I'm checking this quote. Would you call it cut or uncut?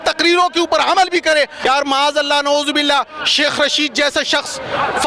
cut